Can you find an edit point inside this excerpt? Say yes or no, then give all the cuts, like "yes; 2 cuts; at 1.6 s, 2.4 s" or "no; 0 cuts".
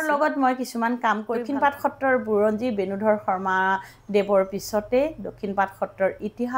yes; 1 cut; at 1.4 s